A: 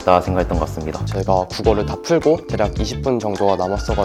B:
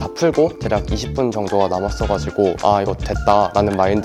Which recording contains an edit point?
A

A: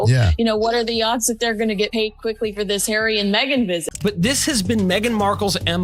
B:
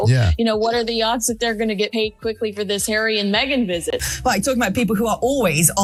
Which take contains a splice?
A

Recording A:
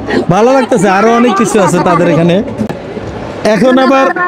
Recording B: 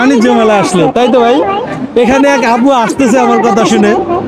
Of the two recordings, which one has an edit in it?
A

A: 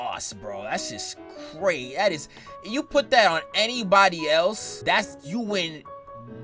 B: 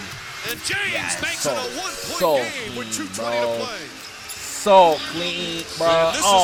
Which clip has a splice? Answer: A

